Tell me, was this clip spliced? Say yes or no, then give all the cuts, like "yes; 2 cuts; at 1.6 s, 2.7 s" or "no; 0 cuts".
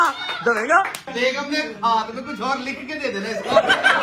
yes; 1 cut; at 1.0 s